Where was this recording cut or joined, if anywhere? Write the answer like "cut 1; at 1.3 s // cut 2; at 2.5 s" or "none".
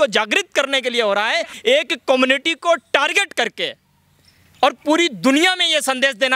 cut 1; at 1.5 s